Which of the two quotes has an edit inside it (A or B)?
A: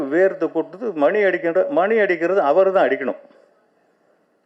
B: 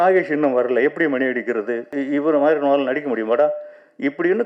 B